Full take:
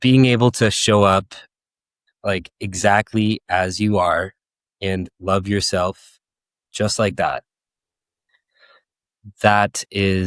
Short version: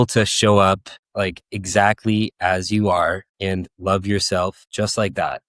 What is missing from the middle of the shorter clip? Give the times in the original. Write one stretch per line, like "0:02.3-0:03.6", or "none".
0:01.4-0:02.0
0:04.4-0:04.7
0:06.0-0:06.6